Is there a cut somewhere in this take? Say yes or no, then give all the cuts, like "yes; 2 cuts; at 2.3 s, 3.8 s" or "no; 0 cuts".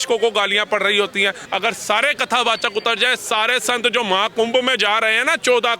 yes; 1 cut; at 1.4 s